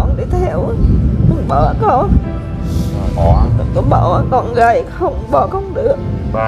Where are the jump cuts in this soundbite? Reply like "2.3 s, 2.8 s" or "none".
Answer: 3.2 s